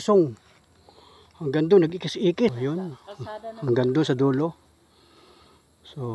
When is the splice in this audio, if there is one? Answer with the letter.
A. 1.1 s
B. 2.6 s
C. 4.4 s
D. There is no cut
B